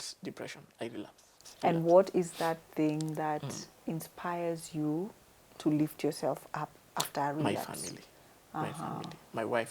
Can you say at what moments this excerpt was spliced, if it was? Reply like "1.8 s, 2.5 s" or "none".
1.5 s